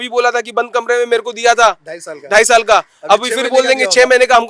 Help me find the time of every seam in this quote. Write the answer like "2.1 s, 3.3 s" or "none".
none